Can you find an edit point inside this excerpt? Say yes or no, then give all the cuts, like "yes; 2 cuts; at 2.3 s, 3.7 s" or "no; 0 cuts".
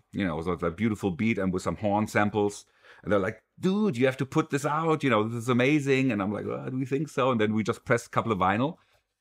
no; 0 cuts